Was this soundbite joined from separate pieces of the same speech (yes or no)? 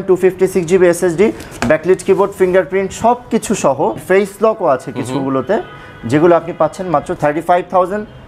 no